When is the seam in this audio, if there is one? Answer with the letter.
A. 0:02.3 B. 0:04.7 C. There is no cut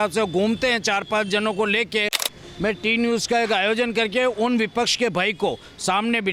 A